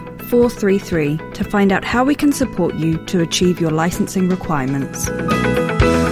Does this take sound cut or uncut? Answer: cut